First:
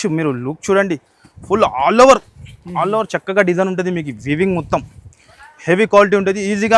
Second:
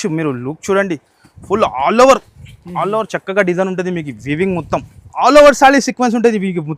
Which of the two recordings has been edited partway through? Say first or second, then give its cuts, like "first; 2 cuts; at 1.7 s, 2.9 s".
second; 1 cut; at 5.0 s